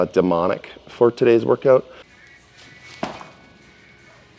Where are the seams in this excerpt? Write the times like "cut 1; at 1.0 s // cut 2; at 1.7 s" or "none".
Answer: cut 1; at 2.2 s